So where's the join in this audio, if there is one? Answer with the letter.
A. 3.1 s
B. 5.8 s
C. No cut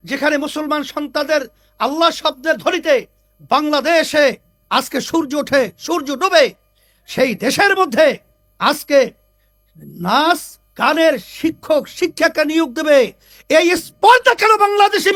C